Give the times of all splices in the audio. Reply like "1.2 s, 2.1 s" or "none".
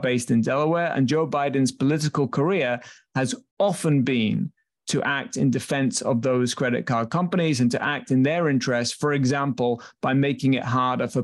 none